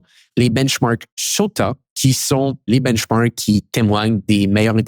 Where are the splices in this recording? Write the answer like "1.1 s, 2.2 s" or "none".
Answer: 2.7 s